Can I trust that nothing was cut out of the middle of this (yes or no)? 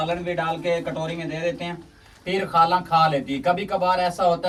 yes